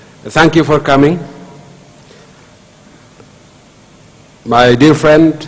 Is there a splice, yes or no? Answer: no